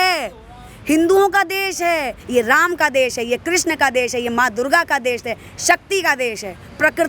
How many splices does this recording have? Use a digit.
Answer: 1